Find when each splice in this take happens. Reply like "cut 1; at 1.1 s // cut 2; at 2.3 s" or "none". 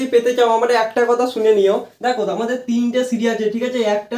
none